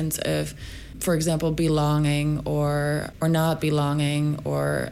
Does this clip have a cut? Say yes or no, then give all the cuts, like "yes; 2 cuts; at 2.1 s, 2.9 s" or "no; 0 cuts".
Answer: yes; 2 cuts; at 1.0 s, 3.1 s